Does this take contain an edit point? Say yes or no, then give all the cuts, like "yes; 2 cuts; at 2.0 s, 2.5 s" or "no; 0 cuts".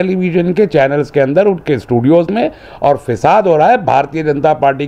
no; 0 cuts